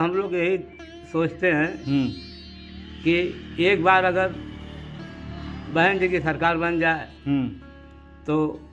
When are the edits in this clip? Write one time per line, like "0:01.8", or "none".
none